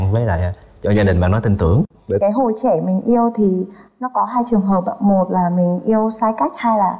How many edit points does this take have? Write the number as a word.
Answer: one